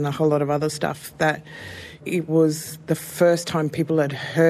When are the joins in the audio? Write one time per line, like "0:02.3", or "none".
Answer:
0:02.0

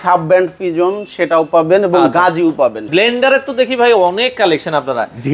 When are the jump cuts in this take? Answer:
0:02.9

